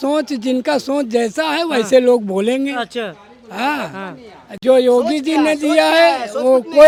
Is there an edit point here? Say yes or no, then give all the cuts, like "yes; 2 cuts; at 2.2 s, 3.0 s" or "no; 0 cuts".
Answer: no; 0 cuts